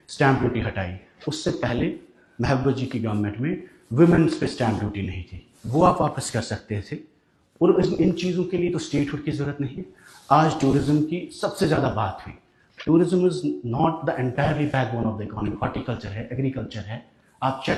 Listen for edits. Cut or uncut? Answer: uncut